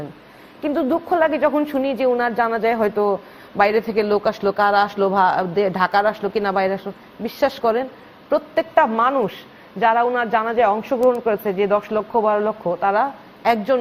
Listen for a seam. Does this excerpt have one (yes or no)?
no